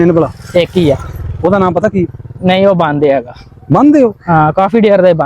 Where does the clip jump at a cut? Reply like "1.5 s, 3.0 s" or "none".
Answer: none